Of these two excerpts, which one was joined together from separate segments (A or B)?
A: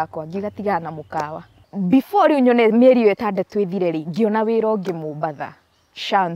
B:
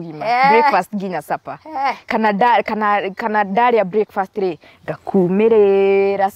A